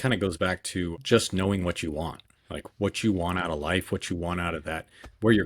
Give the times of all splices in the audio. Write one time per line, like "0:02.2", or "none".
0:00.9